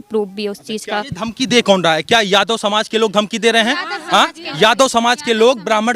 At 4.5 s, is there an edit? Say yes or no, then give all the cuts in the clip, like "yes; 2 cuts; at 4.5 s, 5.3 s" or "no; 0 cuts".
no; 1 cut; at 1.1 s